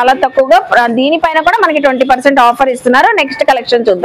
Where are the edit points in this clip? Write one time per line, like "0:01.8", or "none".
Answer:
none